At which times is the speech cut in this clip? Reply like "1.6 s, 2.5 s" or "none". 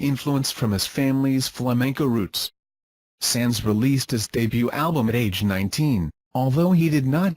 1.6 s